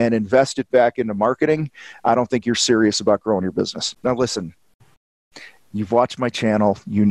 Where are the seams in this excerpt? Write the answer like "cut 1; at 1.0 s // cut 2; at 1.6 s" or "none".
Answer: cut 1; at 3.9 s